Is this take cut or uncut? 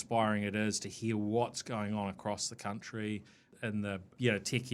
cut